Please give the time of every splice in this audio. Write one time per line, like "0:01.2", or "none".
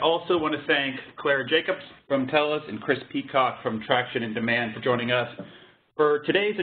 none